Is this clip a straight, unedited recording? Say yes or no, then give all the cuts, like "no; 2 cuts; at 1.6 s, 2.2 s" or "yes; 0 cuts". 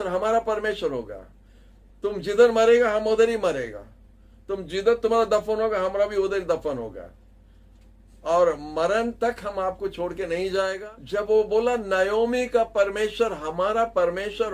no; 1 cut; at 10.9 s